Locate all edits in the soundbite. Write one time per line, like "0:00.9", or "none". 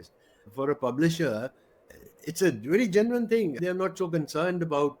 0:03.6